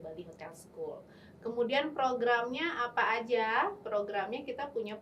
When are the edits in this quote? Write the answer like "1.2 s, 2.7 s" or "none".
none